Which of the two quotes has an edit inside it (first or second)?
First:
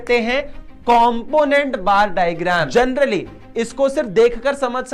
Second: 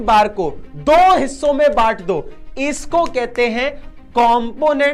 first